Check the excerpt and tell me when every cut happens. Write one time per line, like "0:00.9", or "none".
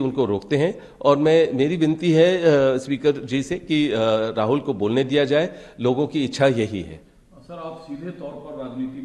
none